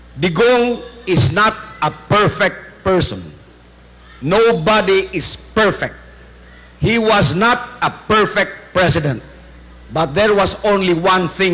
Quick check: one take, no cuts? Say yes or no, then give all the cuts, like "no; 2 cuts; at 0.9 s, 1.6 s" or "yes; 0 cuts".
yes; 0 cuts